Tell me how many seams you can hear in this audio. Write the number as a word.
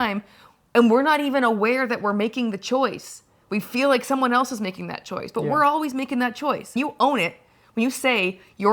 one